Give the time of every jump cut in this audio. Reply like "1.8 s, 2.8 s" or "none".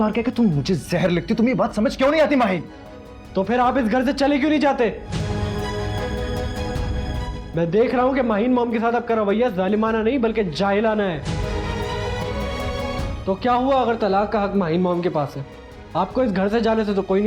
none